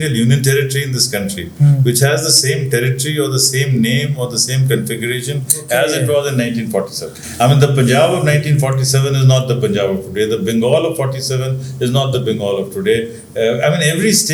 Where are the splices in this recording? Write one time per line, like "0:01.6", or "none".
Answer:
none